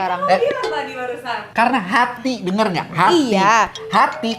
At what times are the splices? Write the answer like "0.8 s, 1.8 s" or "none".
1.5 s